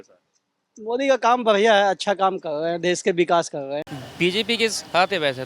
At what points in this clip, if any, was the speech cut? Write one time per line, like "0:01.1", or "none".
0:04.0

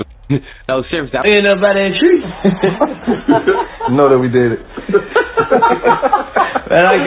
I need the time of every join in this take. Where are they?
0:01.2

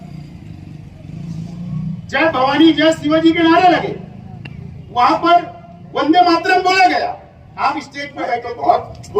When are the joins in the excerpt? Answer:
0:08.3

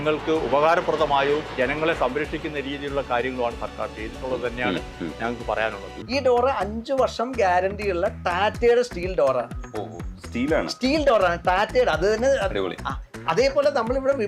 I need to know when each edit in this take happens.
0:05.9

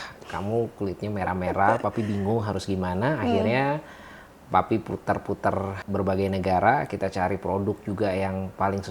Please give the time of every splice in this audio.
0:05.8

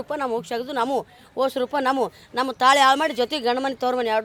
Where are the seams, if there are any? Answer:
none

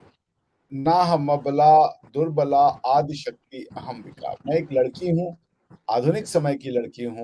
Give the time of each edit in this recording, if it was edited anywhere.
none

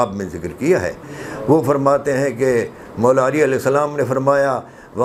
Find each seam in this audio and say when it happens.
none

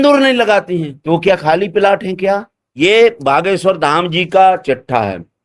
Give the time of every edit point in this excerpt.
0:02.6

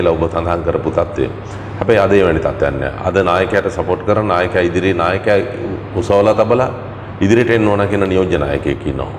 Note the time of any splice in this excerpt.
none

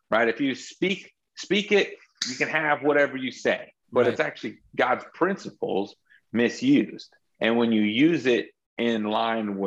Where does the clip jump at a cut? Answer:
0:03.7
0:07.2

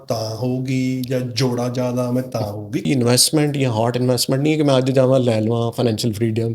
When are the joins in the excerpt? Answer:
0:02.8

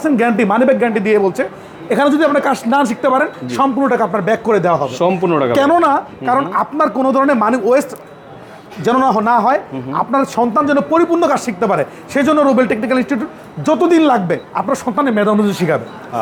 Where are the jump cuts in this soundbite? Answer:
none

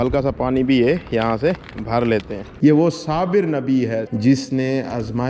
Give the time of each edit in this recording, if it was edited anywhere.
0:02.4
0:04.1

